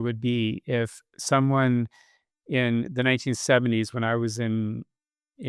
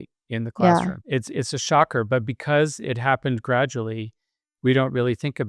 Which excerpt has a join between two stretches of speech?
second; 1 cut; at 1.0 s

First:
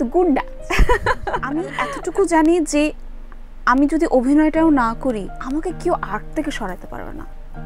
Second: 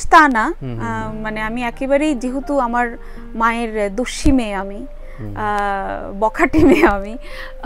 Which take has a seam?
first; 2 cuts; at 1.7 s, 5.3 s

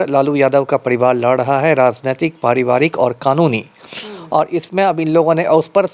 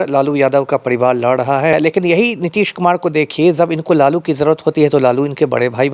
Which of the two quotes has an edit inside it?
second; 1 cut; at 1.7 s

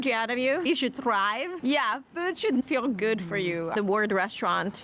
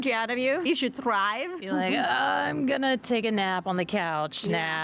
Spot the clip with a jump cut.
first; 2 cuts; at 1.5 s, 2.6 s

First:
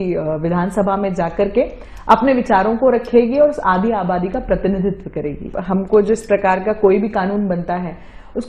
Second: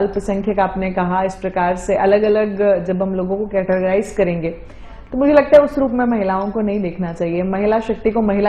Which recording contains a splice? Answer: first; 1 cut; at 5.4 s

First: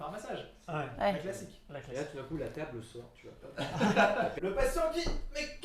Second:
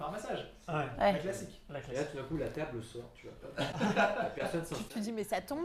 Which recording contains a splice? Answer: first; 1 cut; at 4.4 s

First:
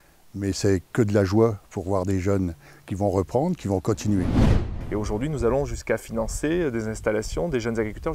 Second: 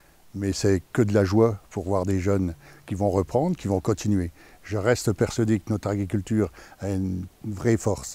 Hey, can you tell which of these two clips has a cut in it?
first; 1 cut; at 4.7 s

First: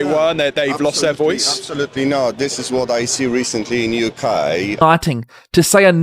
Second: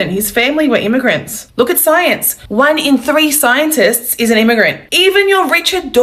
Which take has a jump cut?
first; 1 cut; at 4.8 s

